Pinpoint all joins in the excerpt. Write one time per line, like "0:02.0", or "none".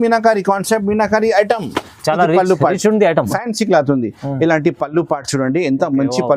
0:03.3